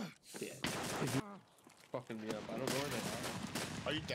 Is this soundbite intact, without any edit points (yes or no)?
no